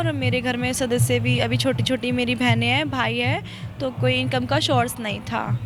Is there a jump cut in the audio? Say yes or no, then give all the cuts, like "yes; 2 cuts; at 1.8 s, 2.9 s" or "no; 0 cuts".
no; 0 cuts